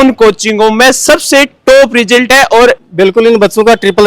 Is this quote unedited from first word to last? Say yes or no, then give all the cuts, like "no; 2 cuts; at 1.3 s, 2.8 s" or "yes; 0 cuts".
no; 1 cut; at 2.8 s